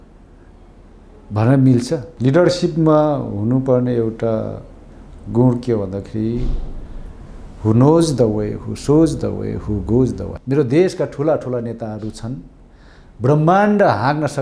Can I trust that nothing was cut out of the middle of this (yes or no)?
no